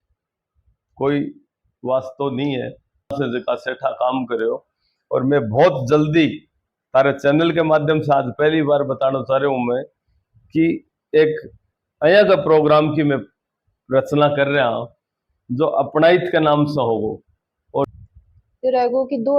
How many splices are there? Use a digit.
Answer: 2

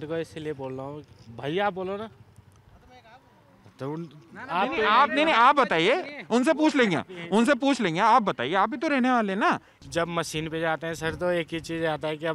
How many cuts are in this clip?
1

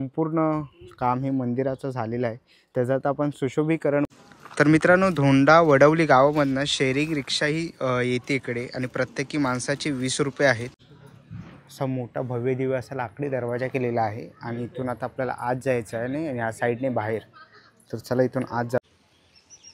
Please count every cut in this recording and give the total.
3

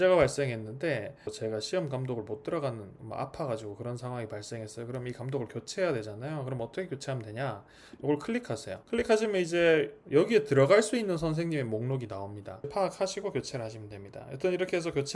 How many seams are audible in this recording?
2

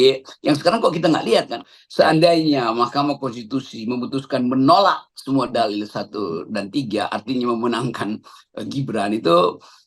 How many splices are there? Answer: 1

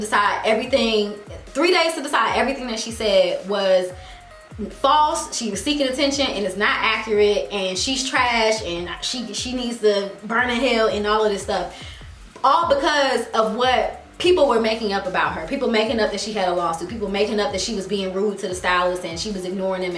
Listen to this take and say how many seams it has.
0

